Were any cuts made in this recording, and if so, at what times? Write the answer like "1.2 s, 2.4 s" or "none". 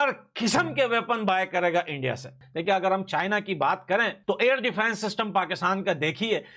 none